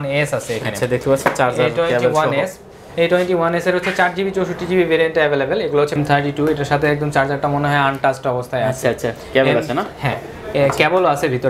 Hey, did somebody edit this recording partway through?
yes; 1 cut; at 6.0 s

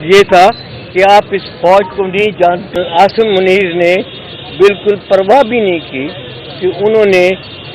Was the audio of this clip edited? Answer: yes; 1 cut; at 2.8 s

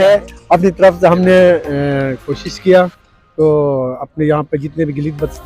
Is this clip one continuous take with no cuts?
yes; 0 cuts

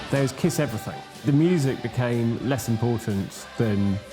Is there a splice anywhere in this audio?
yes; 1 cut; at 1.2 s

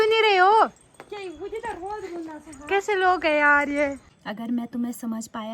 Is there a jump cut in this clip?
yes; 1 cut; at 4.1 s

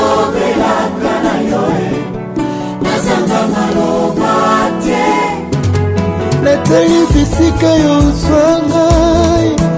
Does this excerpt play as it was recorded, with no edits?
yes; 0 cuts

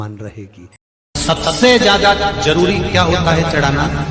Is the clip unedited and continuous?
no; 1 cut; at 1.0 s

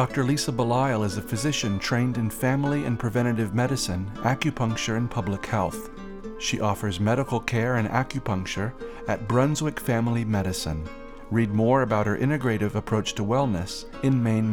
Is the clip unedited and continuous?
yes; 0 cuts

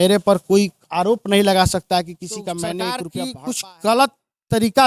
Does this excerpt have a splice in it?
yes; 1 cut; at 3.1 s

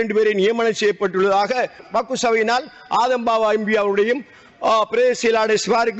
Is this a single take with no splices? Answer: no; 1 cut; at 1.8 s

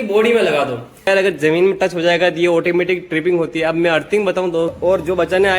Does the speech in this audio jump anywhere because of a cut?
yes; 2 cuts; at 1.1 s, 4.8 s

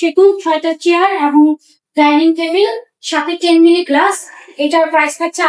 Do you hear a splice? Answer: no; 0 cuts

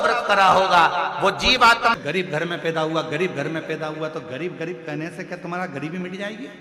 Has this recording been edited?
yes; 1 cut; at 1.9 s

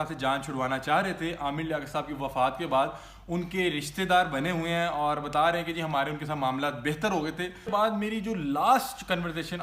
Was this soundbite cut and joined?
yes; 1 cut; at 7.7 s

